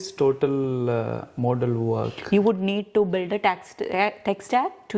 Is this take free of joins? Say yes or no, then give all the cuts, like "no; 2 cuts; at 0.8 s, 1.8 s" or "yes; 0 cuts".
no; 1 cut; at 2.1 s